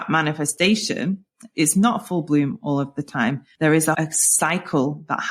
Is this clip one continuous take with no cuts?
no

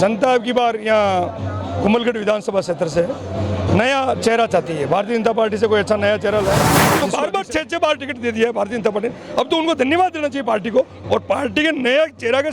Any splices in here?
yes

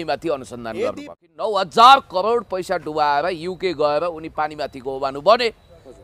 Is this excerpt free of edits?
no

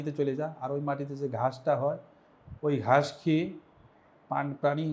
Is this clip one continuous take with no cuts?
yes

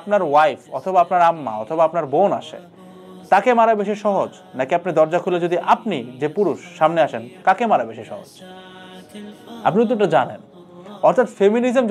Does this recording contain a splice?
no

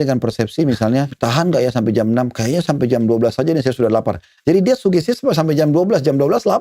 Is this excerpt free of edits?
no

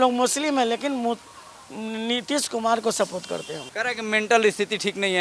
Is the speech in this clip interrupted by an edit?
yes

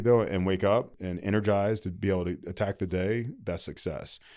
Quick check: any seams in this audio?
yes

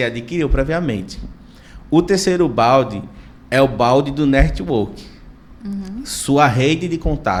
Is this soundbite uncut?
yes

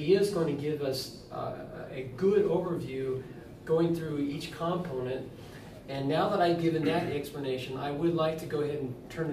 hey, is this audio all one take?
no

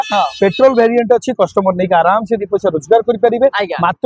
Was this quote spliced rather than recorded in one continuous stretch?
no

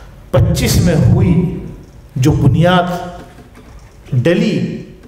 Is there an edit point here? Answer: no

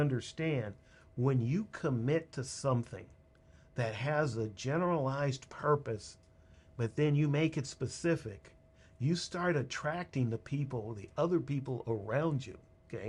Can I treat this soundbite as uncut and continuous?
yes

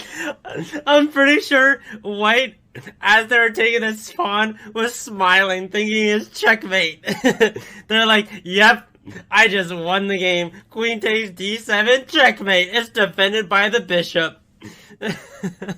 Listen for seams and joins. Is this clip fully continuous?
yes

